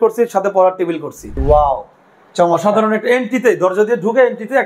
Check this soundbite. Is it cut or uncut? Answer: cut